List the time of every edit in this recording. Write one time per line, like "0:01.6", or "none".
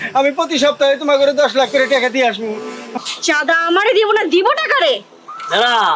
0:02.9